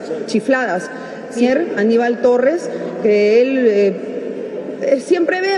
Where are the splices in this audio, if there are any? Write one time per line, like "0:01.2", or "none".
0:01.4